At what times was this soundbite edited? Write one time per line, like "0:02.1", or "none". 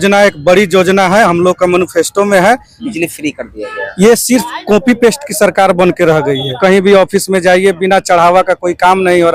0:02.8
0:06.6